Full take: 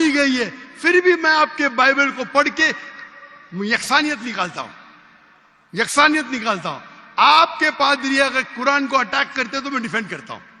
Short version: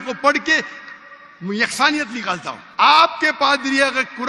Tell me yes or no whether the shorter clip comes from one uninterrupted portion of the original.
no